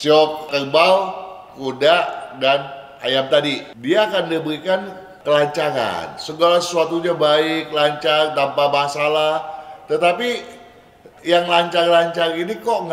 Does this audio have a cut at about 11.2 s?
no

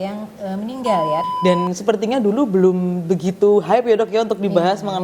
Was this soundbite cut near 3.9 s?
no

